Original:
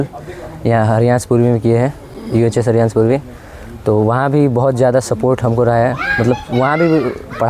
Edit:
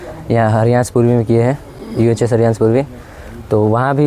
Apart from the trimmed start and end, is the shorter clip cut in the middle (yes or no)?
no